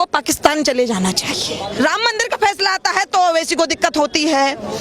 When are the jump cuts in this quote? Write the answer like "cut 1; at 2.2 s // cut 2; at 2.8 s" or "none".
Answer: cut 1; at 1.7 s